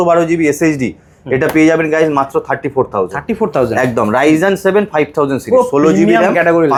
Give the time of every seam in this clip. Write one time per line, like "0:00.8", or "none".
none